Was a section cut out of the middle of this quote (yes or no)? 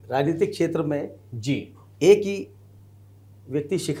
no